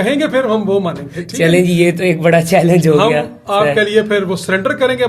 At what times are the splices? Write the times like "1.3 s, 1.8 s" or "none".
none